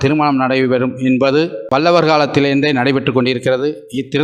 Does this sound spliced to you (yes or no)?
yes